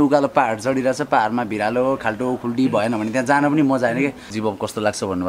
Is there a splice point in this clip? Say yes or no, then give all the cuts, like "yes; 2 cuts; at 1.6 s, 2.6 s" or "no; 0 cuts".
yes; 1 cut; at 4.3 s